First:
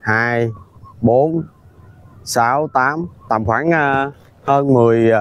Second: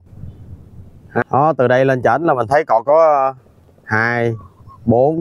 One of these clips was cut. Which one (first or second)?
second